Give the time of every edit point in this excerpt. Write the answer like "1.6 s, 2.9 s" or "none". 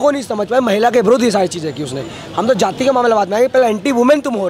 none